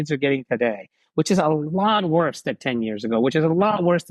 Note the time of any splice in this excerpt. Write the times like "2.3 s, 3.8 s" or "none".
none

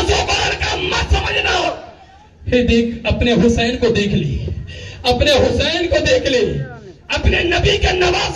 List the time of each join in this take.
none

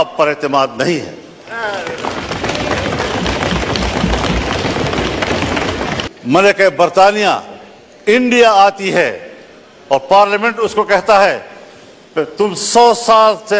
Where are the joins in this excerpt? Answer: 5.9 s

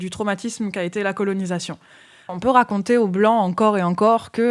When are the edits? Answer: 2.3 s

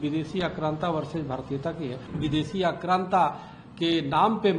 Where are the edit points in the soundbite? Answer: 2.0 s

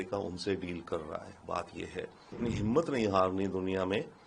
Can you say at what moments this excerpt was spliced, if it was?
2.3 s

